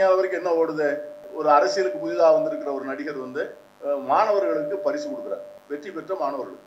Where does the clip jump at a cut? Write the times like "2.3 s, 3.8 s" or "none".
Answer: 1.3 s, 3.6 s, 5.5 s